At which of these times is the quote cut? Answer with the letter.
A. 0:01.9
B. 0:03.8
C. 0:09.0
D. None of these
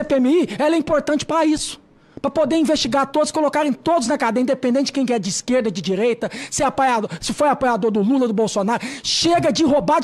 D